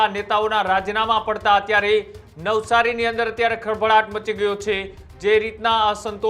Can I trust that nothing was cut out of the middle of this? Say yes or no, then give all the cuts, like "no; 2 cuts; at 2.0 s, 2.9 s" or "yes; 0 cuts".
yes; 0 cuts